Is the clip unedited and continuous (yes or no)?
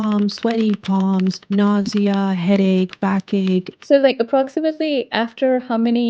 no